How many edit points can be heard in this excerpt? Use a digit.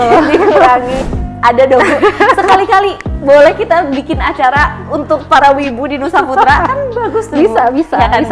1